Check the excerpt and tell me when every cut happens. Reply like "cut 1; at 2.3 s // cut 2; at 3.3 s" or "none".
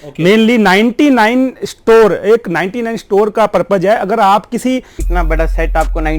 cut 1; at 5.0 s